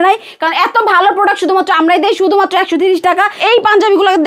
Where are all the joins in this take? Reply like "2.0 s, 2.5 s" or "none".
3.4 s